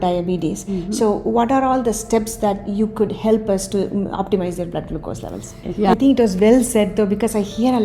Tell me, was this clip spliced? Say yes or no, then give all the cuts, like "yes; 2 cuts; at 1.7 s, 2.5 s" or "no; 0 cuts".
yes; 1 cut; at 5.9 s